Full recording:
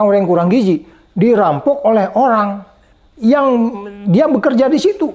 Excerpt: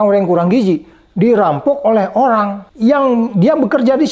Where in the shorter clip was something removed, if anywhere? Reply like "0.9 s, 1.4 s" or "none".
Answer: 2.6 s, 3.3 s